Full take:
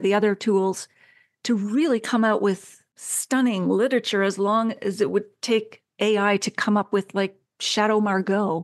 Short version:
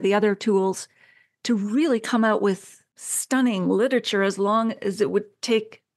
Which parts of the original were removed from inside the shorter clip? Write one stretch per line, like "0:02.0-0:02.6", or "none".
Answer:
none